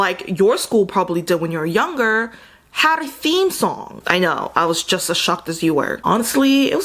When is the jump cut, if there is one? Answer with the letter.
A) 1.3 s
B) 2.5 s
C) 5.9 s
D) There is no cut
C